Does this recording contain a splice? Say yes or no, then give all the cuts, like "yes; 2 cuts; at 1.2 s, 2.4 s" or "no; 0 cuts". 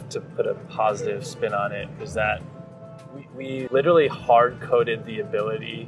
yes; 1 cut; at 3.7 s